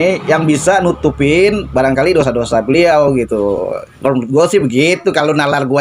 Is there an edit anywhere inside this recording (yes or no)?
no